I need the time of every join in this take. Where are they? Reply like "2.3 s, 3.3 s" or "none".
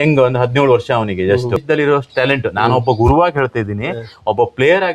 1.6 s